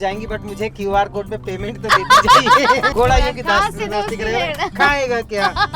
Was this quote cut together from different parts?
yes; 1 cut; at 2.9 s

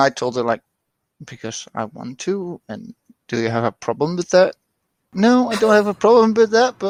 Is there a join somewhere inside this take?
no; 0 cuts

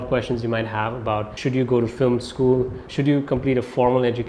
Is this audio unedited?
no; 1 cut; at 1.3 s

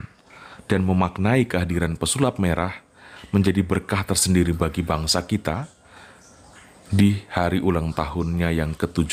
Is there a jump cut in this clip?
no; 0 cuts

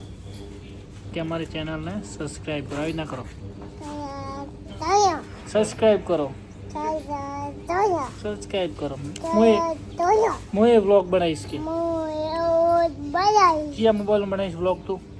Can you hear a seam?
no; 0 cuts

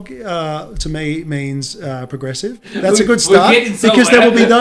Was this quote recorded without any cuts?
no; 1 cut; at 2.6 s

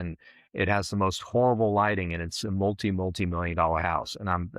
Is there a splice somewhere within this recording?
no; 0 cuts

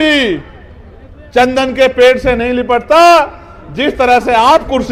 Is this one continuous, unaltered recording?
yes; 0 cuts

